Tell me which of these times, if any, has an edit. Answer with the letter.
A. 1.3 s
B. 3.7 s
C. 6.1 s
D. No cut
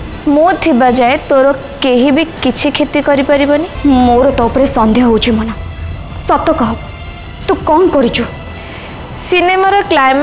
B